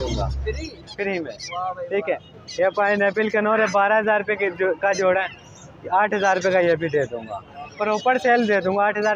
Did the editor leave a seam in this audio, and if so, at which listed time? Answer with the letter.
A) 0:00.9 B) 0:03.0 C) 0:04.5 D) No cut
D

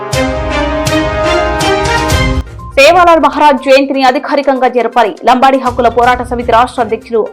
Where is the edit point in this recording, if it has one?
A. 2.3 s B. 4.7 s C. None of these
A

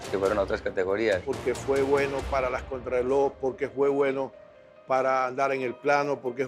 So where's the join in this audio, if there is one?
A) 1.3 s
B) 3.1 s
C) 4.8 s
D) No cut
A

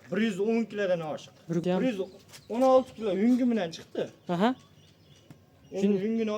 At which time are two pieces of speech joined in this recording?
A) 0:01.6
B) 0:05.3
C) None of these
A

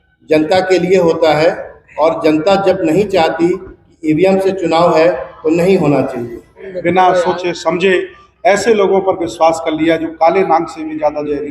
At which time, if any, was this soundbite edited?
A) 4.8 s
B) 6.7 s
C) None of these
B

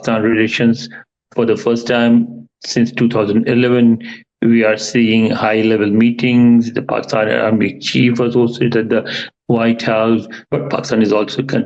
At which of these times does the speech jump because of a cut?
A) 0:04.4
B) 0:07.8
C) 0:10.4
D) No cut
C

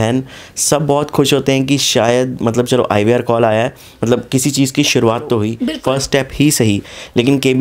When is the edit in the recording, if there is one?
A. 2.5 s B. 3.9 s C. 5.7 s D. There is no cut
C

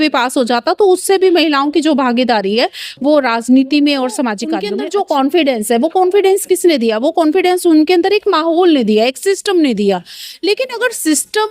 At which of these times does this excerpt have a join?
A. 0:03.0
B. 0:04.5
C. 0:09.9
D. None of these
B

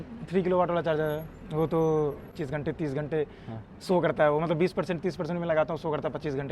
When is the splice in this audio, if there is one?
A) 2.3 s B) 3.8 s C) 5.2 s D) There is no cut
A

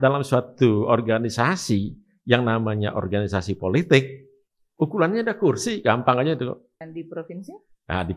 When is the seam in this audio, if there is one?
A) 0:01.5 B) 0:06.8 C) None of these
B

